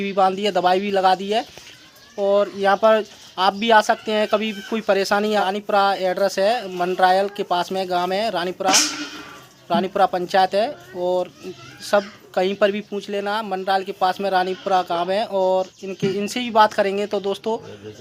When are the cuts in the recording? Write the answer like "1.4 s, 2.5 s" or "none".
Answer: none